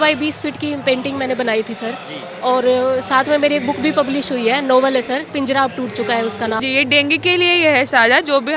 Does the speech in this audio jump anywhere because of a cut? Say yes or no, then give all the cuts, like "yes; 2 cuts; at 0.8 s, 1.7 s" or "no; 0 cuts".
yes; 1 cut; at 6.6 s